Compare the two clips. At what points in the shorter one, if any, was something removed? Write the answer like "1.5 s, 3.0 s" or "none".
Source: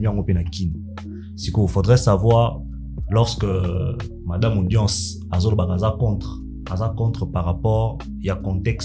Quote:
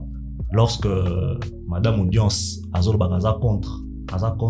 none